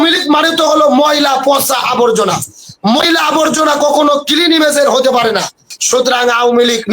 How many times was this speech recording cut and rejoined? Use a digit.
1